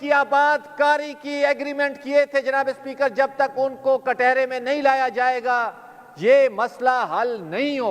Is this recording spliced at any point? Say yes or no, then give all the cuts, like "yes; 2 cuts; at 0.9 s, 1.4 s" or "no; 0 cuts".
no; 0 cuts